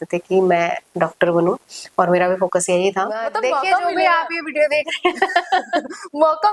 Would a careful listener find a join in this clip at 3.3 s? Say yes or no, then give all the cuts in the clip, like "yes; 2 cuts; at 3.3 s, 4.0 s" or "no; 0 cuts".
yes; 1 cut; at 3.3 s